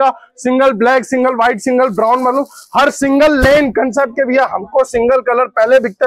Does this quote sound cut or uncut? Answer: uncut